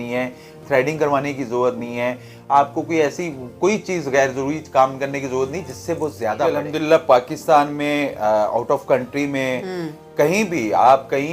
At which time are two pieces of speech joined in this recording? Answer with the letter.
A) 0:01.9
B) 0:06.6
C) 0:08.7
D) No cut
B